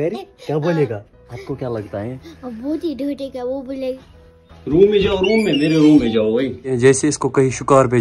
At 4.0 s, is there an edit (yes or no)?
yes